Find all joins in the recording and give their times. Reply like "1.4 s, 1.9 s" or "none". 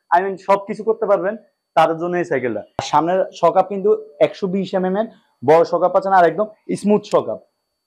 2.9 s